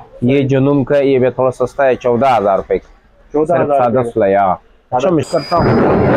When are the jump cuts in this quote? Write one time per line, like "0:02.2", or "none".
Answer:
0:05.3